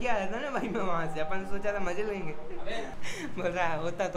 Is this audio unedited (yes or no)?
no